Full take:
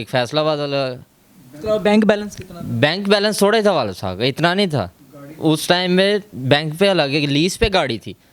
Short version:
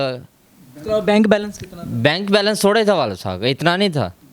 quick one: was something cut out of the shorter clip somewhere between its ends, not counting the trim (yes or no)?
no